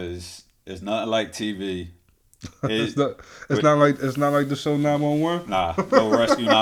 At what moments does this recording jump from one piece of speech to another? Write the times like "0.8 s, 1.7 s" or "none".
none